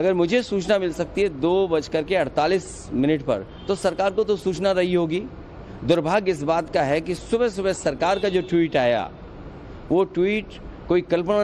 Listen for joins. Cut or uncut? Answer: cut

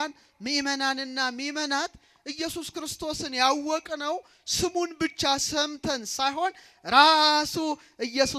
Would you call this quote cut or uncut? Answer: uncut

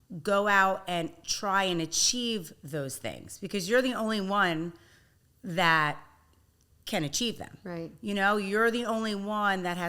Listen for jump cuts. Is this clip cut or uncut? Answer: uncut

